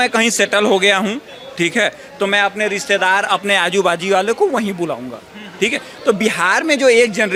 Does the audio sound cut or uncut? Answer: uncut